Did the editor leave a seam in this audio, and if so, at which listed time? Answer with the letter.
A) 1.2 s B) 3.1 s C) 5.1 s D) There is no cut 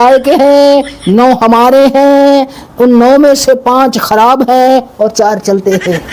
D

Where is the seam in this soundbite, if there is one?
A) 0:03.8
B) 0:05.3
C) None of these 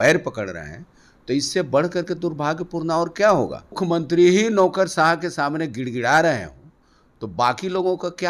A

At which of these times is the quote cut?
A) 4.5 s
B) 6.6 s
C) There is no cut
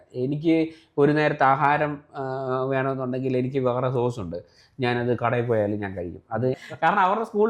B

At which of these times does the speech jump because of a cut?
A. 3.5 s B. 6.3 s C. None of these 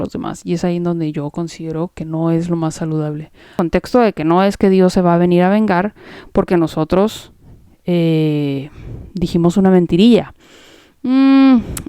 A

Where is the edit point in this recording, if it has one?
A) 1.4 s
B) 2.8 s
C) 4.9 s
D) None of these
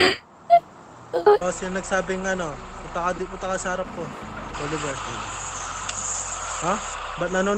A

